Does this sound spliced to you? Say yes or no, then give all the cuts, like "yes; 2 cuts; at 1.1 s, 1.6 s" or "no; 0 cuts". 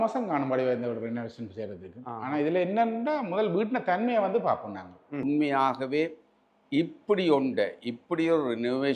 yes; 1 cut; at 5.2 s